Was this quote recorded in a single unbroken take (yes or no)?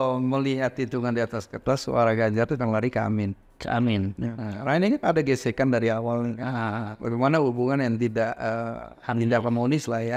yes